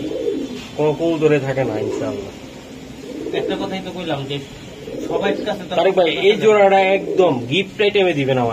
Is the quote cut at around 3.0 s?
no; 0 cuts

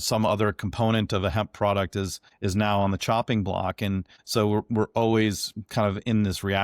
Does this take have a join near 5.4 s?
no; 2 cuts; at 2.2 s, 4.2 s

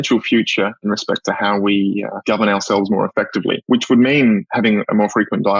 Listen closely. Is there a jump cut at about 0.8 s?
yes; 3 cuts; at 0.8 s, 2.1 s, 3.6 s

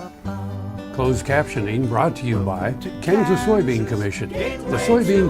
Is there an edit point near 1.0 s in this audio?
yes; 1 cut; at 1.0 s

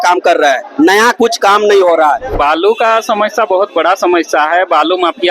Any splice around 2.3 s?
yes; 1 cut; at 2.3 s

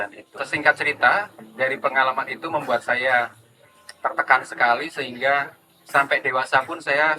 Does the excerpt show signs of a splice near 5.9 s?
no; 0 cuts

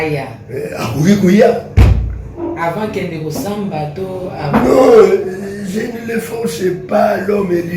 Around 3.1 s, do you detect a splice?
no; 0 cuts

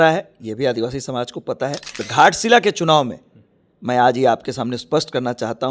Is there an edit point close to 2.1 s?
yes; 1 cut; at 2.1 s

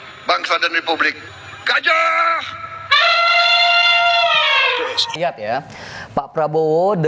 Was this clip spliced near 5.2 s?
yes; 1 cut; at 5.2 s

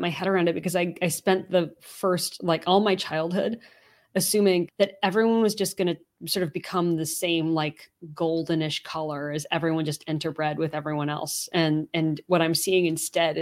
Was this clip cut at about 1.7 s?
no; 1 cut; at 4.7 s

